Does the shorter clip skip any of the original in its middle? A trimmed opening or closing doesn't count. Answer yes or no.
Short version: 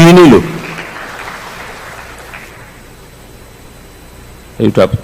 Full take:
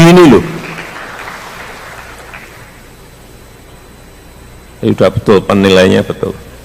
yes